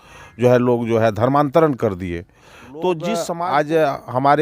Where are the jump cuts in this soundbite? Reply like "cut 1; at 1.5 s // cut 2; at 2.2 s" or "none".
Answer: cut 1; at 3.3 s